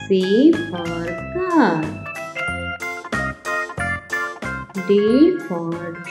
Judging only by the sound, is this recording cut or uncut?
uncut